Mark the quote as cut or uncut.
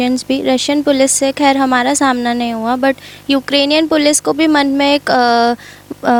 uncut